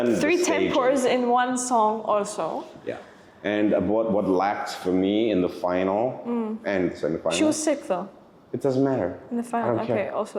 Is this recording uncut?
yes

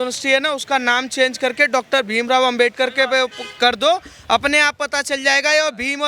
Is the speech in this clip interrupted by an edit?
no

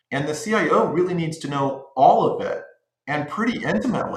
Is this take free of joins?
yes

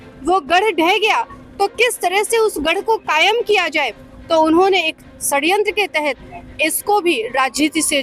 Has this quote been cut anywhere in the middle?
no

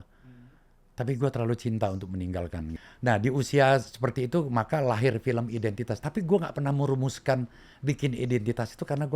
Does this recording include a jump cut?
yes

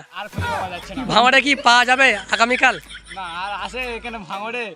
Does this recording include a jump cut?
no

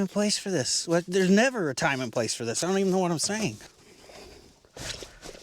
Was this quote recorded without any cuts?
no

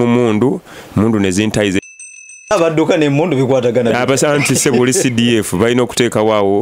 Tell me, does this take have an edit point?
yes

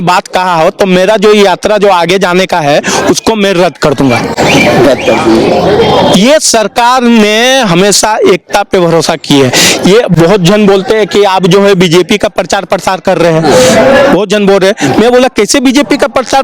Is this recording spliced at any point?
no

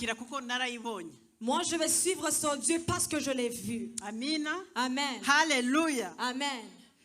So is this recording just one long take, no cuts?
yes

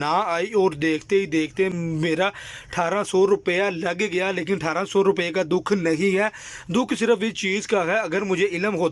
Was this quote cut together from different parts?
no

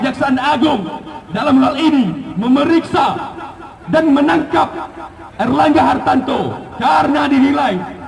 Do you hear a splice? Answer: no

